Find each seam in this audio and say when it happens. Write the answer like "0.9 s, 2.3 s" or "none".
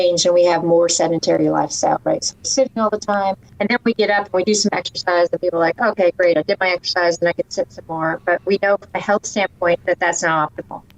3.5 s